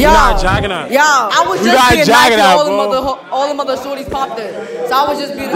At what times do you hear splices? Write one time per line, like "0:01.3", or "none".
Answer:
0:01.3